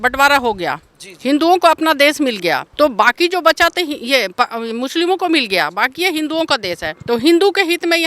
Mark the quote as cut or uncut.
cut